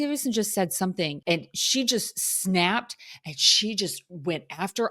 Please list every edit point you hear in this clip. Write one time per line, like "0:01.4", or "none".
0:01.2